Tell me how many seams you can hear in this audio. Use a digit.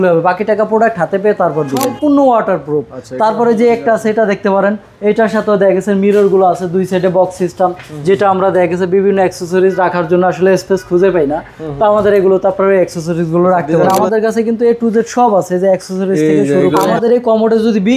3